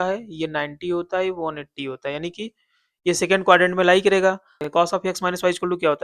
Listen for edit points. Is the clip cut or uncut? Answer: cut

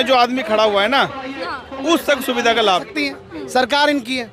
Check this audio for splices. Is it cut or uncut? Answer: cut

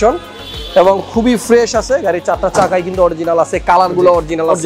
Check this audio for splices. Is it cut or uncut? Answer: uncut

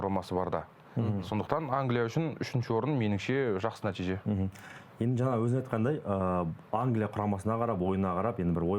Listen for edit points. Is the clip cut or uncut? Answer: uncut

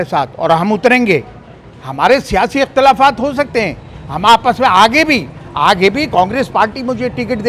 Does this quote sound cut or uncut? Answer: uncut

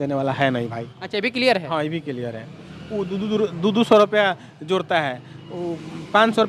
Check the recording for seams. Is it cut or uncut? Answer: uncut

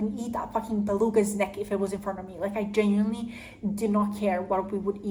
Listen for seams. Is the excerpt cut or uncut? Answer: uncut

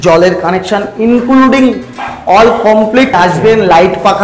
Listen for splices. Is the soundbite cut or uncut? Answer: cut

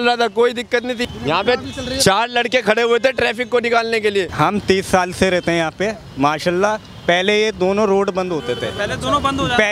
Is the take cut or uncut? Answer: cut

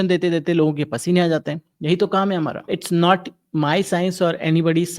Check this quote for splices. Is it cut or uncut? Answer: cut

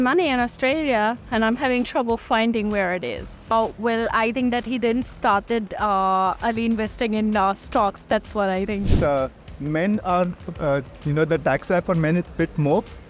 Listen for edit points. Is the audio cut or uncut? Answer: cut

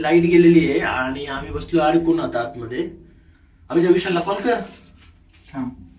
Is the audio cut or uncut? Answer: uncut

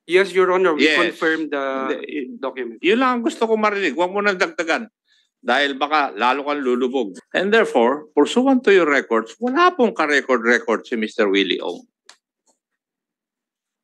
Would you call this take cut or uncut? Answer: cut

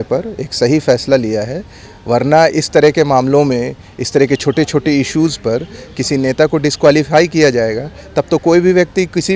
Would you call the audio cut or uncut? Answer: uncut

